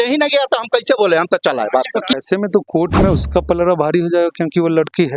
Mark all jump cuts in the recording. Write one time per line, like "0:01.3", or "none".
0:02.2